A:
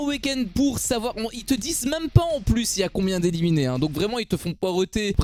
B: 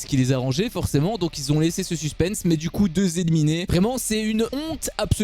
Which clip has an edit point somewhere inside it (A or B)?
B